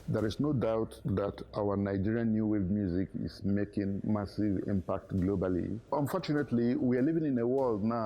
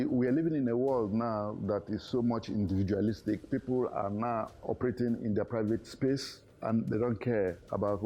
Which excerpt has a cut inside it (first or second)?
first